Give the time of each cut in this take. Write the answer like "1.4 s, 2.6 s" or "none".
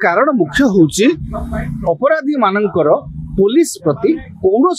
none